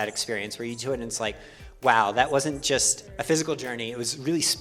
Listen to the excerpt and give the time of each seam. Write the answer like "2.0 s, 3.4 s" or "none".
none